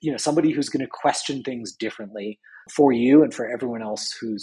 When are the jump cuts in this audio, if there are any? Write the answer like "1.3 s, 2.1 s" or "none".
2.7 s